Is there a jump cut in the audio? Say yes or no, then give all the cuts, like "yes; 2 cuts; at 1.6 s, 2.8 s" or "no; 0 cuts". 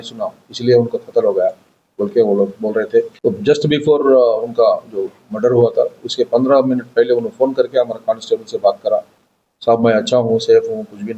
yes; 1 cut; at 3.1 s